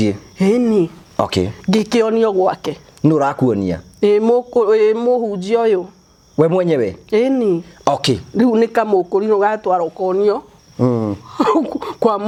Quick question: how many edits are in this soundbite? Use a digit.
0